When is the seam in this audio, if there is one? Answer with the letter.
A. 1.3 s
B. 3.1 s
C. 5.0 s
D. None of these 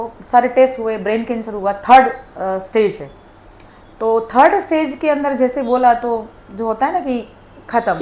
D